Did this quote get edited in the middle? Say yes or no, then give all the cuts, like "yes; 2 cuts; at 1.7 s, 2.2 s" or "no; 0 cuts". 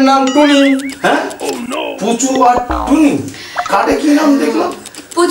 no; 0 cuts